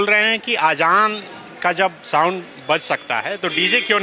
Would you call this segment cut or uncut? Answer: uncut